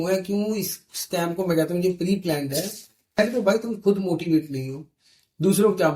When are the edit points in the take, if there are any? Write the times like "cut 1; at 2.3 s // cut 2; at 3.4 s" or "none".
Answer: cut 1; at 3.2 s